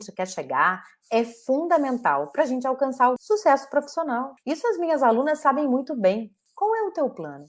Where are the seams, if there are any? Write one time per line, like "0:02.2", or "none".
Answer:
0:03.2
0:04.3
0:06.4

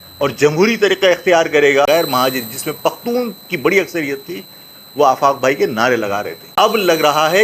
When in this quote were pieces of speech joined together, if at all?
0:01.9
0:06.5

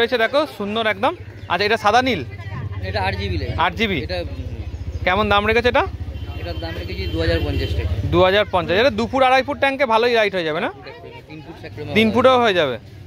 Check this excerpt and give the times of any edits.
none

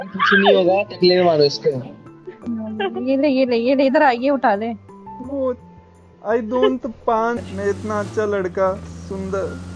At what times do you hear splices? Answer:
0:07.4

